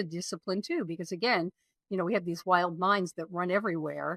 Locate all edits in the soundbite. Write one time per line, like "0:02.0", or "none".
none